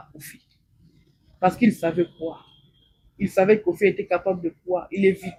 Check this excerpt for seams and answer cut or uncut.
uncut